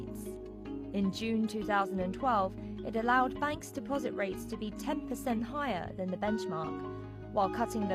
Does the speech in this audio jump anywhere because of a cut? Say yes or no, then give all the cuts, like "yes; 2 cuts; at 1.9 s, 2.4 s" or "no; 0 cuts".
yes; 1 cut; at 3.2 s